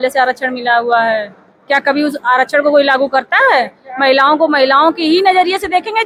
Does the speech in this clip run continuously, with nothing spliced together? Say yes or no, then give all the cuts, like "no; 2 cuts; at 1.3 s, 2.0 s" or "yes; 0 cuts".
yes; 0 cuts